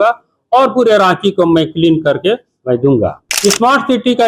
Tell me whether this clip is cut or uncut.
cut